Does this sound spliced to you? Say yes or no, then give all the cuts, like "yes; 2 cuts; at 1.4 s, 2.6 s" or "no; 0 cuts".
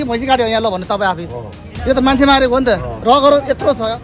no; 0 cuts